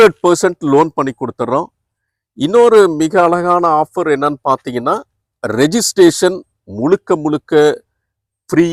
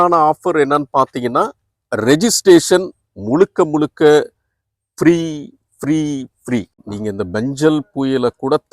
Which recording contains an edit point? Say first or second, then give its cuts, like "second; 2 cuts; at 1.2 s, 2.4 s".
second; 1 cut; at 6.7 s